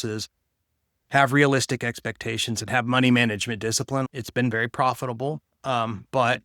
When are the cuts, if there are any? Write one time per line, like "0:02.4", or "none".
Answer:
0:04.1